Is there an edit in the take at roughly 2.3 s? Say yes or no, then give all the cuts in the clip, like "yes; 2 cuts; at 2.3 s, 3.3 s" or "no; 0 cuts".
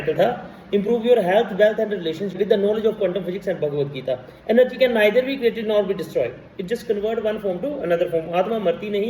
yes; 1 cut; at 2.3 s